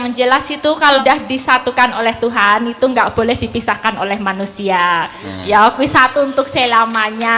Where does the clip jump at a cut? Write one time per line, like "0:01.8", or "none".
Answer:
0:01.0